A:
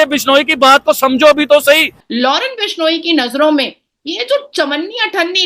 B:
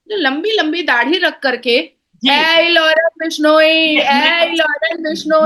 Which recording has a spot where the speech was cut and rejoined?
A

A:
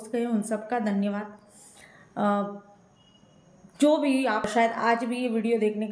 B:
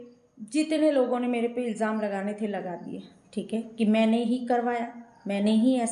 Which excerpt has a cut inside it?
A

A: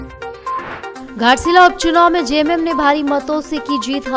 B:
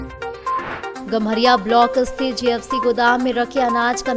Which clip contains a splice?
A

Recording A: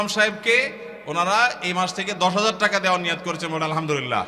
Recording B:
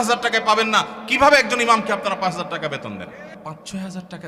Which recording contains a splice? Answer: B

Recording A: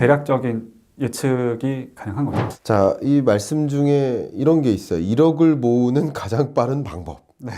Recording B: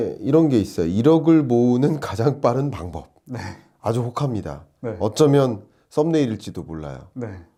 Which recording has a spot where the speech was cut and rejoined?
A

